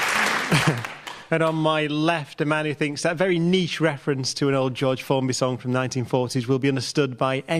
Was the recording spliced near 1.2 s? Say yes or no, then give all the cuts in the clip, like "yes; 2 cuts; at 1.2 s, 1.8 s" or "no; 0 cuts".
no; 1 cut; at 5.3 s